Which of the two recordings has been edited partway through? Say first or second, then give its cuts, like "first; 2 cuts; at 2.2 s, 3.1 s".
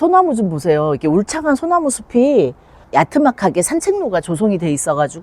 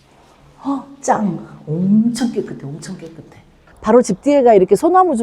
second; 1 cut; at 3.7 s